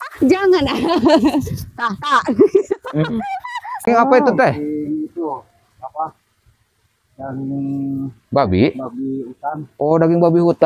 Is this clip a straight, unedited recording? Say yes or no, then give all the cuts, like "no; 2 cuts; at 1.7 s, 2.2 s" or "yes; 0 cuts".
no; 1 cut; at 3.9 s